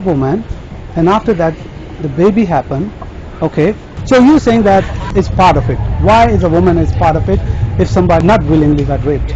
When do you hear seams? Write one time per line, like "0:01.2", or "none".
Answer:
0:03.9
0:05.0
0:08.2